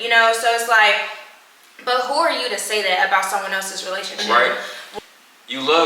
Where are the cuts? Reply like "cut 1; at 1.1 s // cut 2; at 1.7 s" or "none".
cut 1; at 4.2 s